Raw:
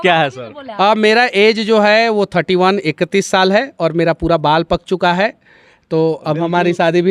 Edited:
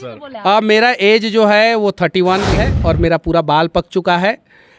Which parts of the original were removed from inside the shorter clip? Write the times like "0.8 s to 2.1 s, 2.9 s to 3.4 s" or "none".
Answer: 3.0 s to 3.6 s